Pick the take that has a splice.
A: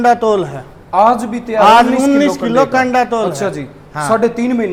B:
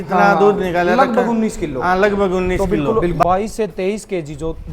B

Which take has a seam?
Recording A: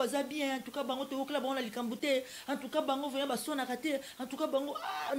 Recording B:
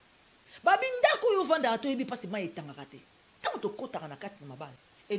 B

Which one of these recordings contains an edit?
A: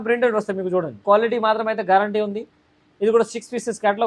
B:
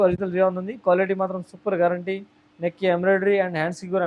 A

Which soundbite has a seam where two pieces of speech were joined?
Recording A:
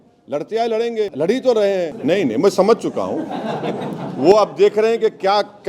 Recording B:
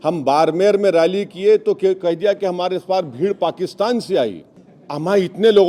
A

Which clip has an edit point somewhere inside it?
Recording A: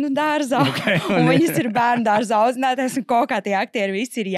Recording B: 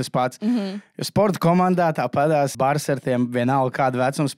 B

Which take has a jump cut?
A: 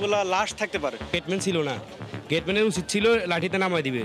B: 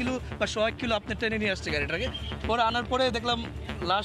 A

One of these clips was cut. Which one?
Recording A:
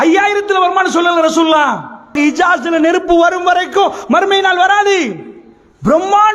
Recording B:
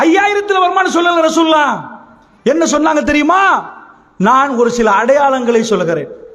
A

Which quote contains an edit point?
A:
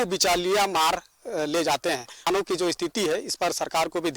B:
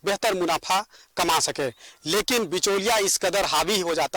A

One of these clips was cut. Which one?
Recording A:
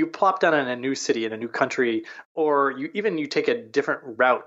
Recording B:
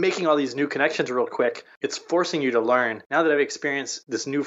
B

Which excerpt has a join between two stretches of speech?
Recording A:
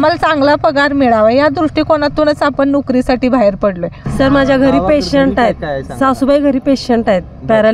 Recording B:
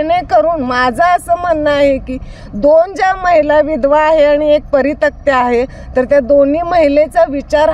A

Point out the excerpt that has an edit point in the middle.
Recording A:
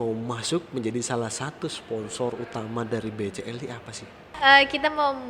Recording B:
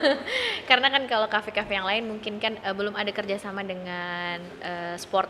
A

